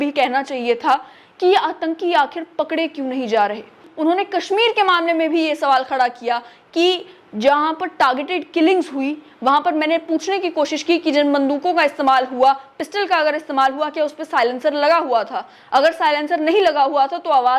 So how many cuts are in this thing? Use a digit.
1